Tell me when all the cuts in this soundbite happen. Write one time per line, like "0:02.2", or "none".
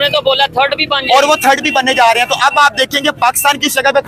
none